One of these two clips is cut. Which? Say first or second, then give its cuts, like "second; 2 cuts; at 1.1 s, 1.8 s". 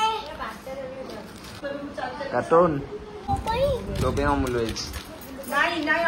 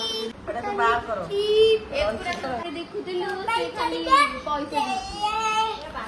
second; 1 cut; at 2.6 s